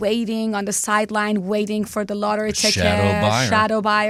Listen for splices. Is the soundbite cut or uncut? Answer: uncut